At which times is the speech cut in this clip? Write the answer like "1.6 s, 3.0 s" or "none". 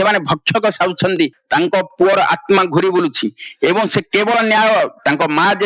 1.3 s